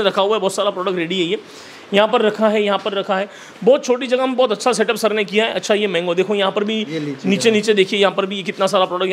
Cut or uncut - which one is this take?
uncut